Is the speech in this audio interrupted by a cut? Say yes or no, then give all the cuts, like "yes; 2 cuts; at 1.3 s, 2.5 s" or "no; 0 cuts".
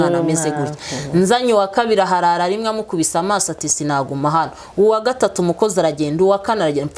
no; 0 cuts